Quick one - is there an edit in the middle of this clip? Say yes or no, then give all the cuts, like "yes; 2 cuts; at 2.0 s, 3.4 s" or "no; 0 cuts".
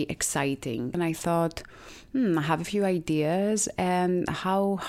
yes; 1 cut; at 1.0 s